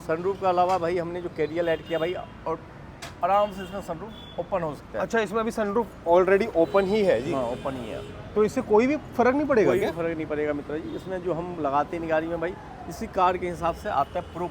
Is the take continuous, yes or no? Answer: yes